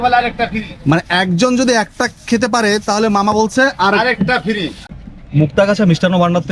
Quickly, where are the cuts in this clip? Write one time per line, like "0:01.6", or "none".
0:04.8